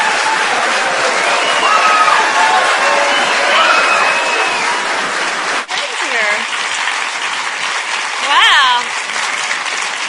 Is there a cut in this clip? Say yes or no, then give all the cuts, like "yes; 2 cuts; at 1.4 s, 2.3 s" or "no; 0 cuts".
yes; 1 cut; at 1.6 s